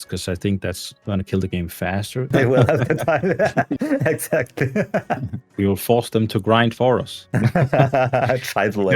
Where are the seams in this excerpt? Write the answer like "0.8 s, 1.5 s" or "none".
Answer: 2.3 s, 5.5 s